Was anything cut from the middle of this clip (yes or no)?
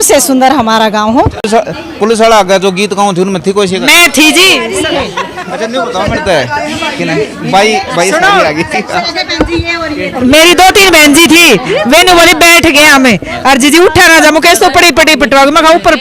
yes